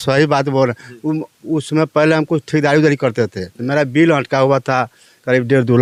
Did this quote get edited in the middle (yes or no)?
no